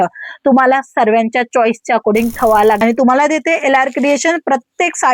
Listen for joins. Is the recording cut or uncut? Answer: cut